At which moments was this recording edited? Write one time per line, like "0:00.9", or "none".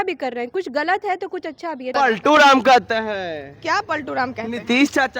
0:01.9

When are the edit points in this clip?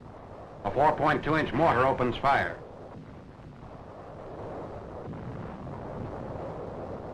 0:02.5

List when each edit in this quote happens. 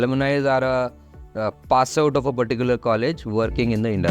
none

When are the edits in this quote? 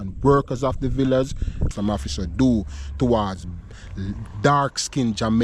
0:01.6

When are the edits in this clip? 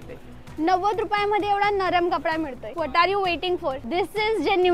0:02.6
0:03.8

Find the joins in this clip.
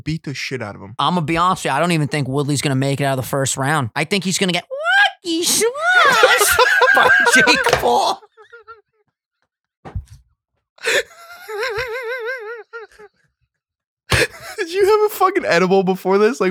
0:01.0
0:03.9

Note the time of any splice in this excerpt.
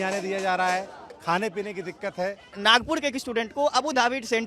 0:02.5

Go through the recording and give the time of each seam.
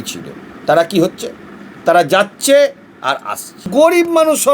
0:03.6

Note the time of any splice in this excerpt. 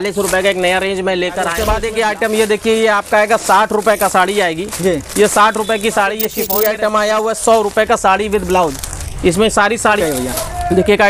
0:01.7
0:06.4
0:10.0

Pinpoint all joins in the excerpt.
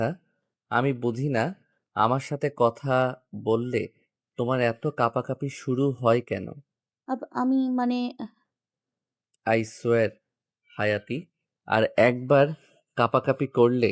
none

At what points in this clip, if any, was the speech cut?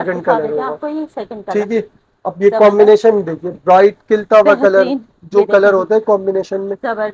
none

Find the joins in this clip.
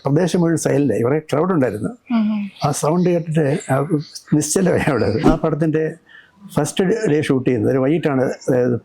0:05.2

